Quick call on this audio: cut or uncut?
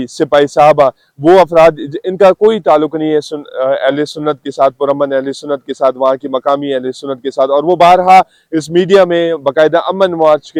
uncut